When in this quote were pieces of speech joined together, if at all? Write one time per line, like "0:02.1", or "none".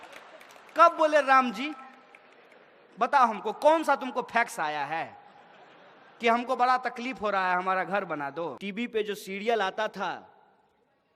0:08.6